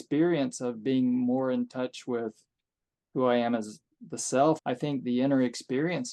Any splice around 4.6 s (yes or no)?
yes